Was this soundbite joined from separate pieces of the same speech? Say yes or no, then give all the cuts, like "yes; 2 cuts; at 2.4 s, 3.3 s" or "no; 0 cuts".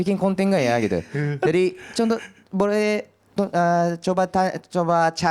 no; 0 cuts